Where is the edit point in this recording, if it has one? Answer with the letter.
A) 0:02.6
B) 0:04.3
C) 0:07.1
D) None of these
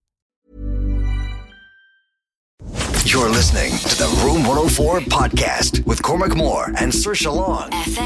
A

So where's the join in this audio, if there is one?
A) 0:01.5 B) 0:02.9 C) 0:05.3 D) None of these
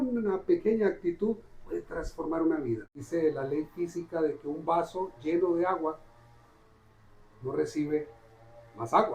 B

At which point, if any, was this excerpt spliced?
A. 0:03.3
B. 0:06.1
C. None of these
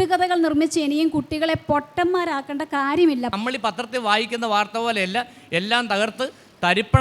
A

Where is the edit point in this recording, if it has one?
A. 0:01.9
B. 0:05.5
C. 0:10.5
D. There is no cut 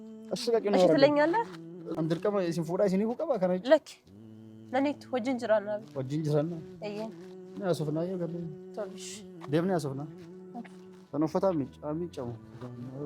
A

